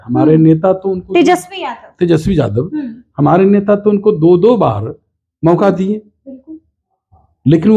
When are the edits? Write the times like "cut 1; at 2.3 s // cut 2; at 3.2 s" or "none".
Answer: none